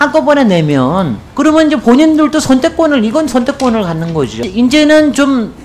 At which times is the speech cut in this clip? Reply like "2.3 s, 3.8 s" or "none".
1.2 s, 4.4 s